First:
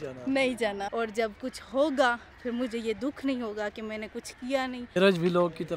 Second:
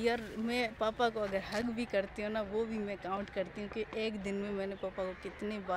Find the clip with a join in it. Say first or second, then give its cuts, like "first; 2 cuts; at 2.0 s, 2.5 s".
first; 2 cuts; at 0.9 s, 4.8 s